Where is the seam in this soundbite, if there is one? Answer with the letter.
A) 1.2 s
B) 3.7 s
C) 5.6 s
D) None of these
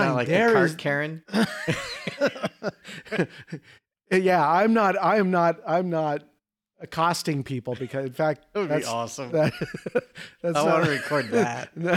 D